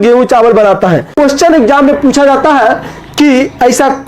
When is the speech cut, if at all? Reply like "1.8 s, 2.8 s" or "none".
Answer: 1.1 s